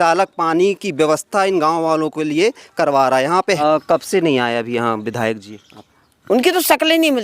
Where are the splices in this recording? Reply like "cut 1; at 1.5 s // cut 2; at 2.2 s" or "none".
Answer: cut 1; at 3.4 s